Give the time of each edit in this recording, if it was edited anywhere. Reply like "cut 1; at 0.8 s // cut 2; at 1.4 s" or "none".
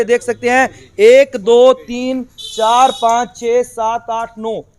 none